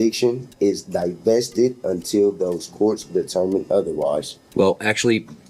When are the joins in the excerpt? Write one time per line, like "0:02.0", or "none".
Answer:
0:04.4